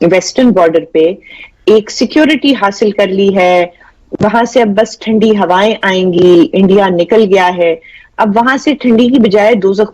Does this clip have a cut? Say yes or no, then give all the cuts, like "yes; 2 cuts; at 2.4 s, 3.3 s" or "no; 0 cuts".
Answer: no; 0 cuts